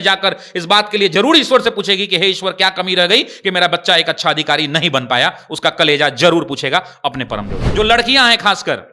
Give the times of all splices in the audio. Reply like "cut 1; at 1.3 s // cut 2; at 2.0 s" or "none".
cut 1; at 7.6 s